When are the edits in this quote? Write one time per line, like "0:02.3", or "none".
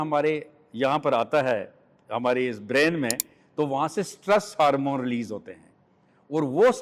none